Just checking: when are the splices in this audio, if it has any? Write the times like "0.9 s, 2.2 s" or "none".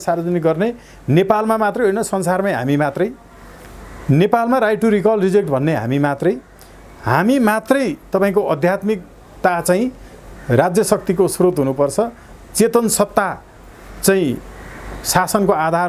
none